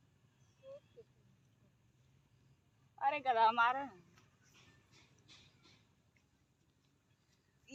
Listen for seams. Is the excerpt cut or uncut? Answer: uncut